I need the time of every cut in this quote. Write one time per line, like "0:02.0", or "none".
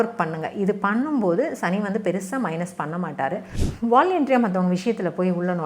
0:03.6